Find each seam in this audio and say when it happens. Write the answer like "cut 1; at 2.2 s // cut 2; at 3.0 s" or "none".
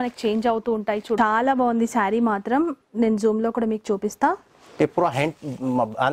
cut 1; at 1.2 s